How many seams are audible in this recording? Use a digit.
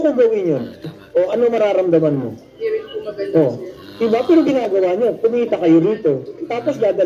2